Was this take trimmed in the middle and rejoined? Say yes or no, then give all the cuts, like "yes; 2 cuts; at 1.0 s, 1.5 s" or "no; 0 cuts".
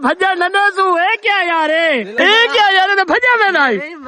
yes; 1 cut; at 2.1 s